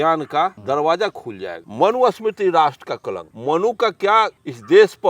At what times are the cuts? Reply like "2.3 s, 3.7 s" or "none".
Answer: 1.6 s, 3.2 s